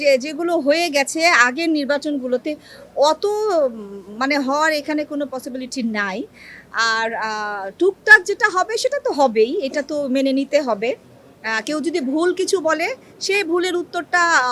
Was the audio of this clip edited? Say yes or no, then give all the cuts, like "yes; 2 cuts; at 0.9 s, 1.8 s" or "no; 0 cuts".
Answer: no; 0 cuts